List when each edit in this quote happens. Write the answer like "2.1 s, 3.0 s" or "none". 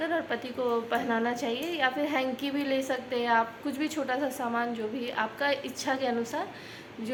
none